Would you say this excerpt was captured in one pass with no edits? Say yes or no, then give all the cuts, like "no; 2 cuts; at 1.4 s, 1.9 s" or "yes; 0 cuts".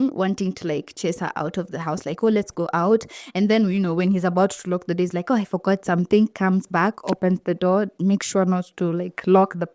yes; 0 cuts